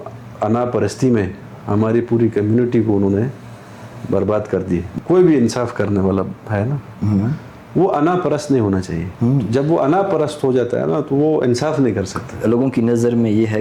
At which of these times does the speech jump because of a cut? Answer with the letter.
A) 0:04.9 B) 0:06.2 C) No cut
C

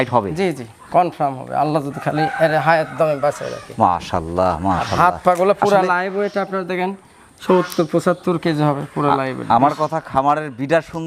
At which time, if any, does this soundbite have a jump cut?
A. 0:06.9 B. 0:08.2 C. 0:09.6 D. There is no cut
D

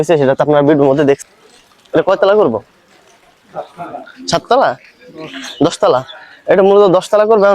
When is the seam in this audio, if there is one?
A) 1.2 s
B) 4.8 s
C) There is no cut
A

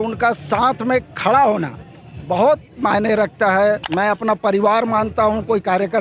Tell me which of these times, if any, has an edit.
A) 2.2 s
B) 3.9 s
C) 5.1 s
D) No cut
B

